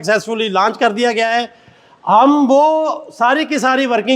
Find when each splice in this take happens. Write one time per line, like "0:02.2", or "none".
none